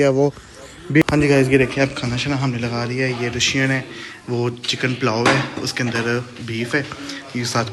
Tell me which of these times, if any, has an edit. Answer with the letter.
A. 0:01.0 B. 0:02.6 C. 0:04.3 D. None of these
A